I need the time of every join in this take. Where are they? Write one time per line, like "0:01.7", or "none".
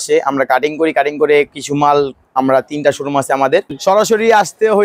0:03.7

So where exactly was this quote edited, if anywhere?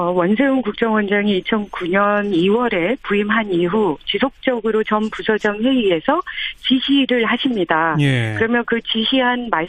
0:03.7

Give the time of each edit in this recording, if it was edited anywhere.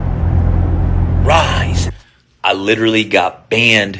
0:01.9

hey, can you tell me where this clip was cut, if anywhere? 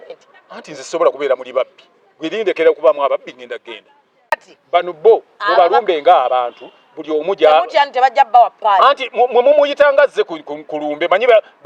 0:04.5

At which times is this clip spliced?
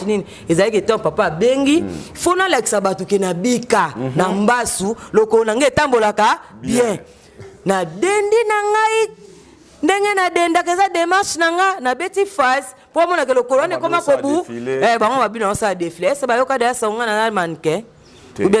none

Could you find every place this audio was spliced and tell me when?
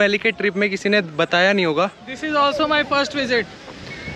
0:02.2

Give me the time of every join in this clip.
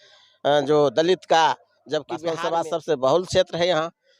0:02.3

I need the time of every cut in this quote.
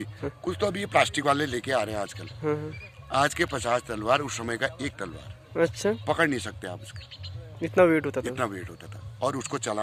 none

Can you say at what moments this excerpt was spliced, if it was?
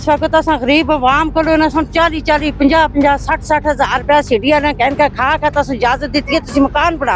none

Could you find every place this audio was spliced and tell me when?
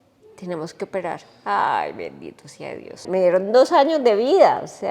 0:03.0

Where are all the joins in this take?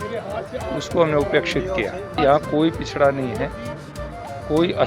0:02.1

